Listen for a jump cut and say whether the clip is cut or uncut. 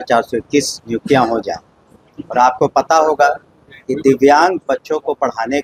uncut